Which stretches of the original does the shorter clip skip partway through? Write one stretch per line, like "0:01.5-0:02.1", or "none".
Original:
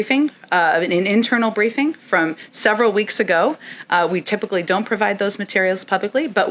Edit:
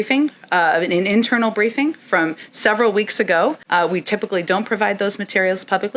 0:03.6-0:03.8